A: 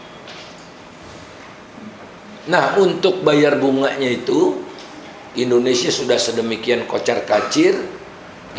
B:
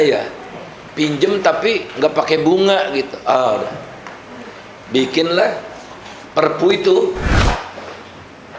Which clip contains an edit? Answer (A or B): B